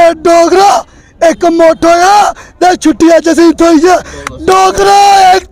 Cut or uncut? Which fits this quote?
uncut